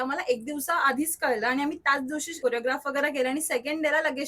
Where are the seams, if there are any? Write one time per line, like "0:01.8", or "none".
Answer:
0:02.3